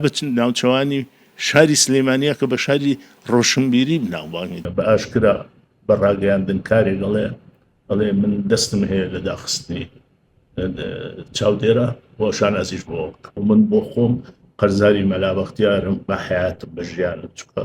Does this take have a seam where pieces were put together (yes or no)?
yes